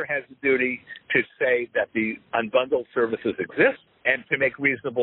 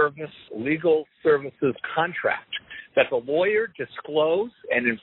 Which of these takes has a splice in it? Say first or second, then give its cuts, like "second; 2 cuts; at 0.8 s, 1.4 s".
first; 2 cuts; at 2.2 s, 3.9 s